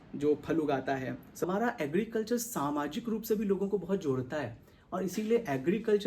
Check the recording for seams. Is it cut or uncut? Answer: cut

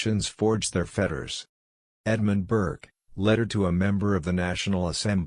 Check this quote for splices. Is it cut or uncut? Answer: uncut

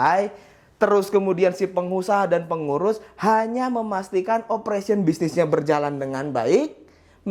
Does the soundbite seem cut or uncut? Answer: uncut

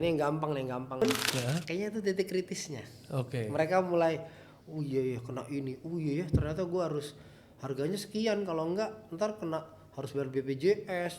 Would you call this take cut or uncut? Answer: cut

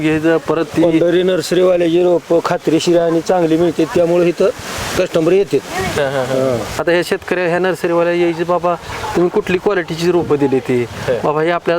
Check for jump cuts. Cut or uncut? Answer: cut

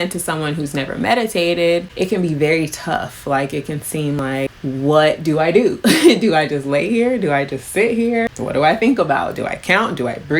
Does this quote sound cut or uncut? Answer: cut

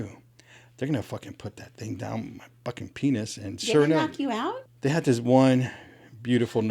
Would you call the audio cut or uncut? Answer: cut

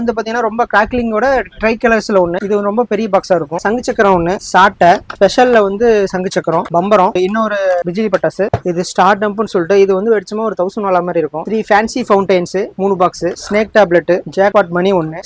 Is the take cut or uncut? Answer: uncut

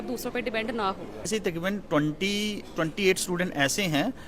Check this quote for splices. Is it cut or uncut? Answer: cut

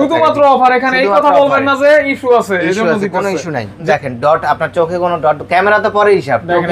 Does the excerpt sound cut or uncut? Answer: cut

